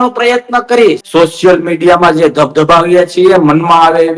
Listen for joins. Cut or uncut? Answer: cut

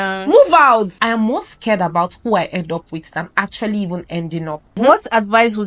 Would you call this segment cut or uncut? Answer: cut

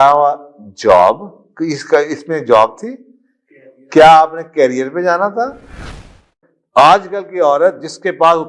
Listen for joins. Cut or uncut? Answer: cut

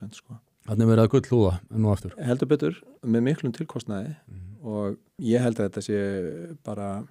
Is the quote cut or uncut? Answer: cut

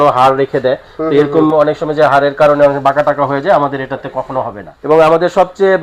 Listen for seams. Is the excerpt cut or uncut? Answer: cut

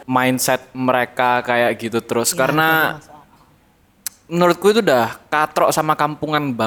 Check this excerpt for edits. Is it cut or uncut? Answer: uncut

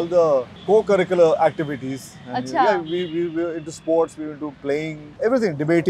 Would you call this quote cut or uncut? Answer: uncut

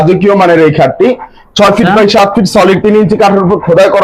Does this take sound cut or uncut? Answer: uncut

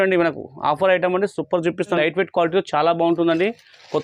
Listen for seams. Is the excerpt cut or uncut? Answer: cut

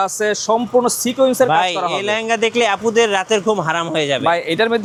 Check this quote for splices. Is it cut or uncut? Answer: uncut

